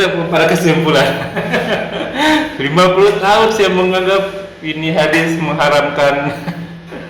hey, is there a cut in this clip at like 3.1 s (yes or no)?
no